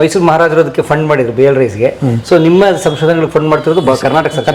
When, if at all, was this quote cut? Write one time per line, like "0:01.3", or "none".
none